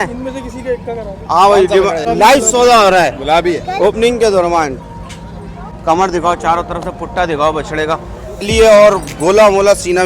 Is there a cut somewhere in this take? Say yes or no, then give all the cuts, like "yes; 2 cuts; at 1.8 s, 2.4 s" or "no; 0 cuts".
yes; 3 cuts; at 2.0 s, 5.7 s, 8.4 s